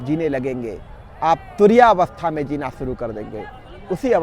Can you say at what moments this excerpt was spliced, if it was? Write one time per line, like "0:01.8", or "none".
none